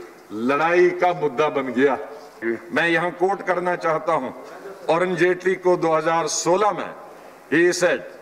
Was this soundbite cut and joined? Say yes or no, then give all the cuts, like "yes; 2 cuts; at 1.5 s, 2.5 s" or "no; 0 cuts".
yes; 1 cut; at 2.4 s